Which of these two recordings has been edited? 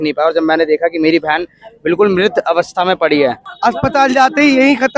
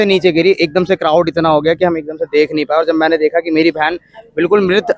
first; 1 cut; at 3.5 s

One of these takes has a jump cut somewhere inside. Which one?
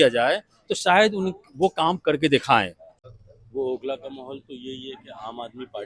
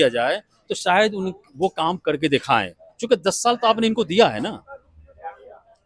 first; 1 cut; at 2.9 s

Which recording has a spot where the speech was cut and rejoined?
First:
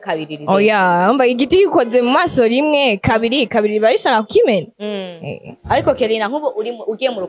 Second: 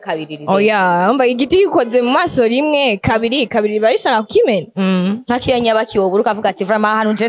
second; 1 cut; at 4.7 s

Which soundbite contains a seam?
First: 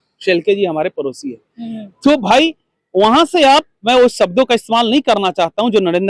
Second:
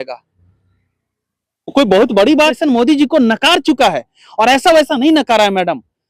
second; 1 cut; at 2.5 s

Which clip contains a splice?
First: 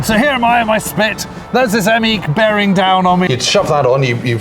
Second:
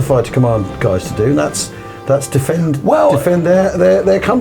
first; 1 cut; at 3.3 s

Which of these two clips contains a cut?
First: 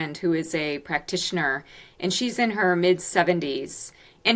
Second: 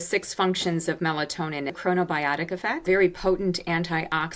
second; 2 cuts; at 1.8 s, 2.8 s

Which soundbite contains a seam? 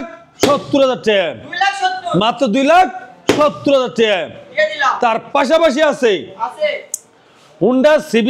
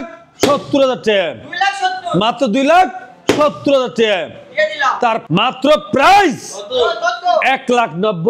second; 1 cut; at 5.2 s

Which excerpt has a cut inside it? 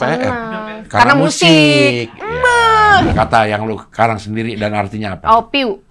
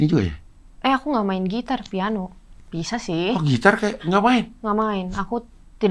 first; 1 cut; at 3.1 s

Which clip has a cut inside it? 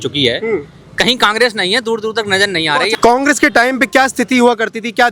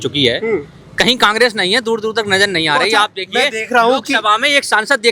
first; 1 cut; at 2.9 s

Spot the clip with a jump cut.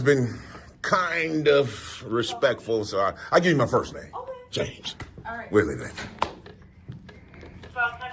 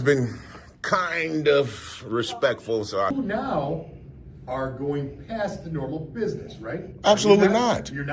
second; 1 cut; at 3.1 s

